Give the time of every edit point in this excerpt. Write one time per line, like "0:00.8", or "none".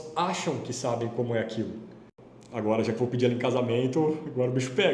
0:02.1